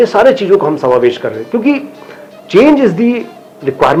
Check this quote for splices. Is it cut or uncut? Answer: uncut